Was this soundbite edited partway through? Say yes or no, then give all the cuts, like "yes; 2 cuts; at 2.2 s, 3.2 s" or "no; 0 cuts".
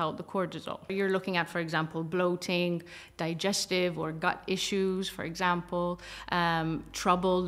yes; 1 cut; at 0.9 s